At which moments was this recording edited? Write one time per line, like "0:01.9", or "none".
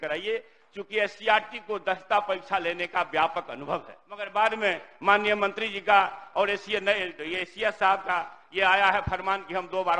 0:04.3